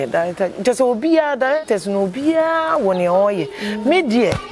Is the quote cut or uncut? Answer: uncut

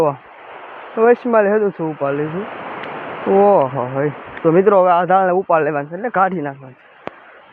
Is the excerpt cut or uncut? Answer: uncut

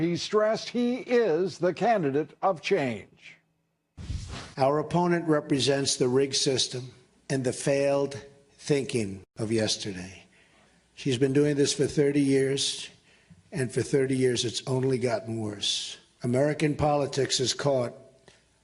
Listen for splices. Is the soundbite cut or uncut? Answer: cut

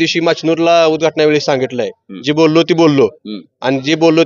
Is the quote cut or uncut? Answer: uncut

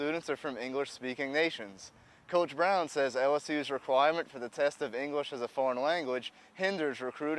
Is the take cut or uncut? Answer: uncut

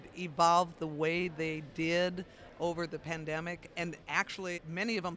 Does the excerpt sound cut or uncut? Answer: cut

